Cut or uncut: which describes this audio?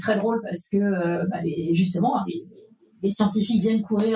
uncut